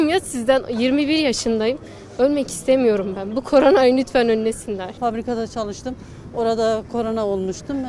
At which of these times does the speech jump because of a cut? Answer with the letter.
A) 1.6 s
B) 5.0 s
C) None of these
B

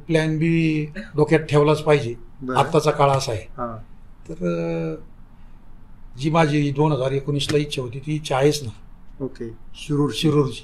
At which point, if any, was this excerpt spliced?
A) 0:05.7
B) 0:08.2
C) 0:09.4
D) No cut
D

